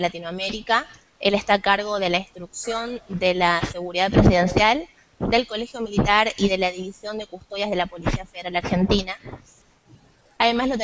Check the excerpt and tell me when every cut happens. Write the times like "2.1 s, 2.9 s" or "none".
8.6 s